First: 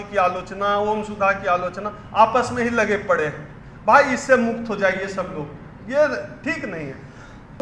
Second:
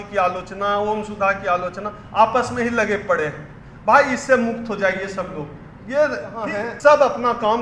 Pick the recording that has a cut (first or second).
second